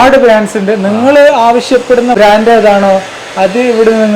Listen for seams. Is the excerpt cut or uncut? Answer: cut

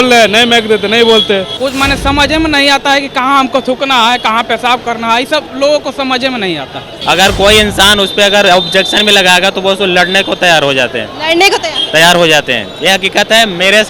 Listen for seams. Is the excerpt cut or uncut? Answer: cut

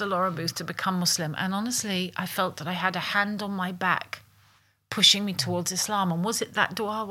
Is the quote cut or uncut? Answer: uncut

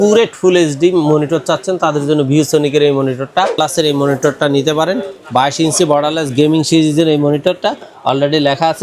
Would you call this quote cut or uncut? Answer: cut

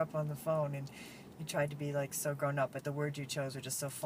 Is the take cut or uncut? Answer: cut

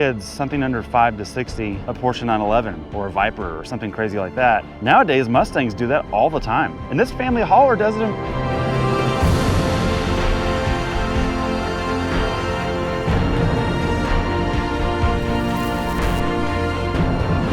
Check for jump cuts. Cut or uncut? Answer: cut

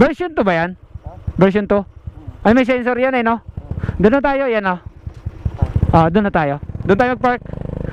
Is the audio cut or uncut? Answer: uncut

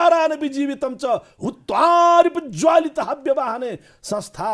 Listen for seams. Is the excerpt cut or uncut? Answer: uncut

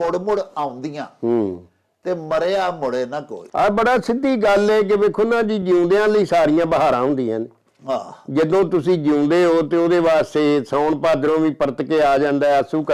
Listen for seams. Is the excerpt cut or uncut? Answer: uncut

